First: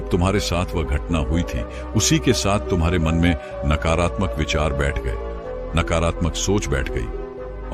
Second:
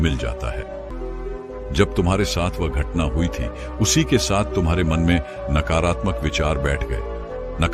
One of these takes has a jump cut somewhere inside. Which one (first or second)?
second